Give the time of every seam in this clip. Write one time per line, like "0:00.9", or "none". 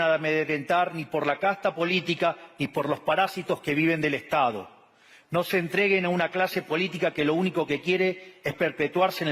none